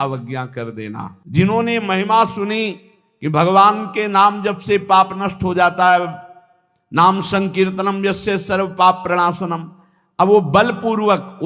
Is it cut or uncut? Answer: cut